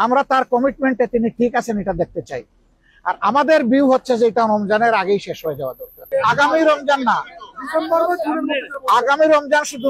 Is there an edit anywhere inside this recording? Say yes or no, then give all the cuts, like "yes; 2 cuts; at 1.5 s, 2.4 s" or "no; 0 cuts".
yes; 1 cut; at 6.0 s